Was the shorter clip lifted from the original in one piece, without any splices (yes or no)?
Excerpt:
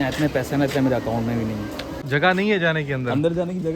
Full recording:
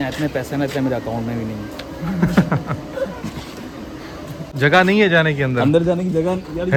no